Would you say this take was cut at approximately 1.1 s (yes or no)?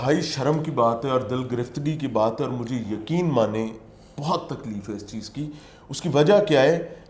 no